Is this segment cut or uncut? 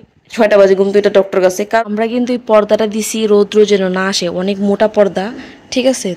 cut